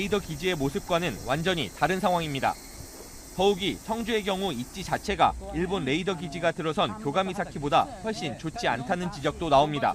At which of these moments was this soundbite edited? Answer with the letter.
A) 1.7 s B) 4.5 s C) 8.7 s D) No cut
D